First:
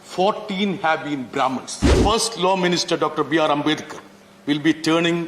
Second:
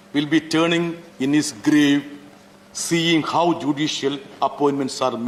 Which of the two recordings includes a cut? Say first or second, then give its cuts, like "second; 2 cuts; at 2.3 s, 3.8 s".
first; 1 cut; at 1.9 s